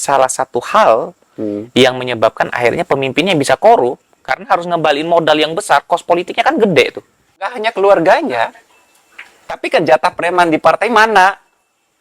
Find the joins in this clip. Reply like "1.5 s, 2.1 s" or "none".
7.5 s